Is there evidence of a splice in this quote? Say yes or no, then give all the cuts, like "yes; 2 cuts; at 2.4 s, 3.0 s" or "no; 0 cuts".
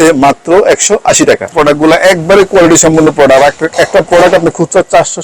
yes; 1 cut; at 1.5 s